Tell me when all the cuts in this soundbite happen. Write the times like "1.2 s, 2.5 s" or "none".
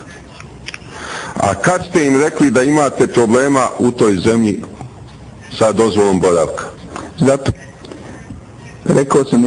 5.0 s